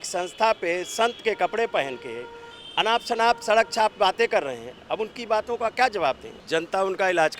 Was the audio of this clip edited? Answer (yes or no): yes